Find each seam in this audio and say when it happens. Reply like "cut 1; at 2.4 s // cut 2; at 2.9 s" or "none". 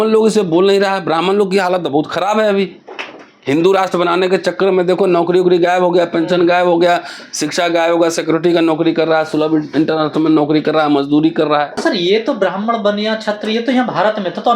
cut 1; at 11.7 s